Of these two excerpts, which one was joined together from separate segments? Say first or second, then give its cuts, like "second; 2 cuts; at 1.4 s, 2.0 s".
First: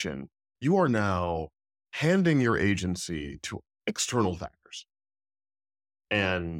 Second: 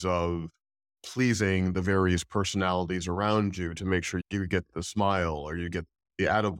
second; 1 cut; at 4.2 s